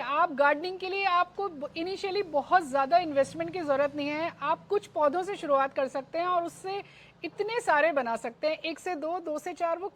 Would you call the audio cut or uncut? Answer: uncut